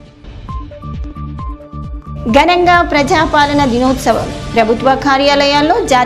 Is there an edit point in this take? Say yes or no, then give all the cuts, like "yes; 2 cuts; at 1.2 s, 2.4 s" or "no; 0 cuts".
yes; 1 cut; at 1.2 s